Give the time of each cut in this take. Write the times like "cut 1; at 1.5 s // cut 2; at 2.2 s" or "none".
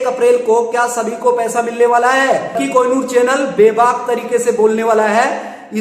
cut 1; at 2.5 s